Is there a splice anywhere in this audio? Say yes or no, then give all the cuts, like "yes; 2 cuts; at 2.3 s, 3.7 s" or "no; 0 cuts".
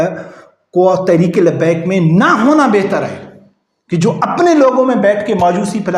no; 0 cuts